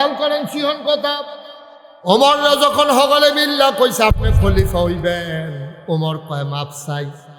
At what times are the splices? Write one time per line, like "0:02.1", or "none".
none